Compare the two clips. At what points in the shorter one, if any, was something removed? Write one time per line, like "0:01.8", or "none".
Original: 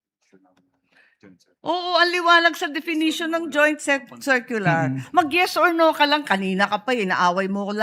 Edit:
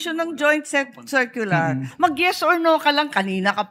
none